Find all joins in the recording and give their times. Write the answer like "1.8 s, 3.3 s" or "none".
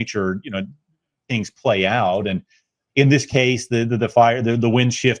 none